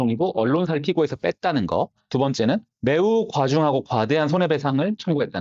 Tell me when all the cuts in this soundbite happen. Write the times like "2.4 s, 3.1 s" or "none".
none